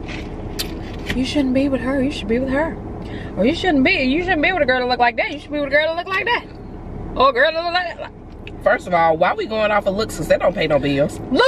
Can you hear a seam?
no; 0 cuts

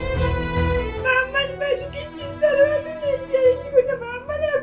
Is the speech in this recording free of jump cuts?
no; 1 cut; at 0.9 s

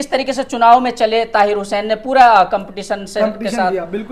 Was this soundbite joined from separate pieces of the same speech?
no; 0 cuts

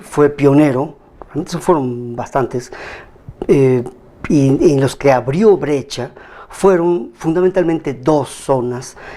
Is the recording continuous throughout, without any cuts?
no; 1 cut; at 2.1 s

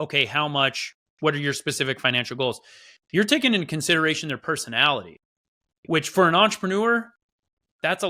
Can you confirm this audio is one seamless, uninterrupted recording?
yes; 0 cuts

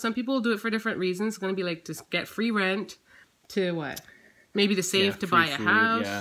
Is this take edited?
no; 0 cuts

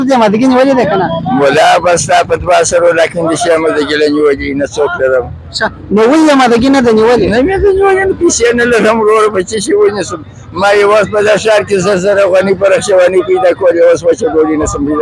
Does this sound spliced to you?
no; 0 cuts

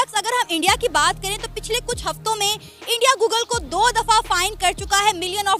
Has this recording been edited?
no; 0 cuts

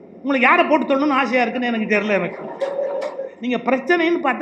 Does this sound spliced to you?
yes; 1 cut; at 3.3 s

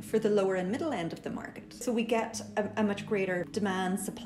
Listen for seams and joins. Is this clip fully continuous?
no; 2 cuts; at 1.8 s, 3.5 s

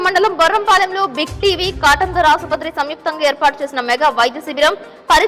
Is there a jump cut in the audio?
no; 0 cuts

